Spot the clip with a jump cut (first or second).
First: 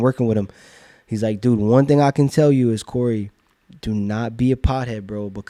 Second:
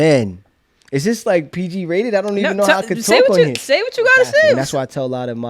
second